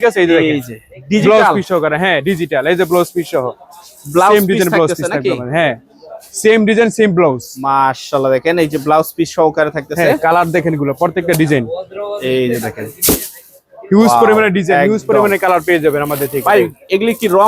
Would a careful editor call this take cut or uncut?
uncut